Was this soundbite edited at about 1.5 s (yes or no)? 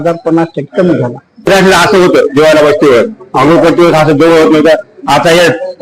yes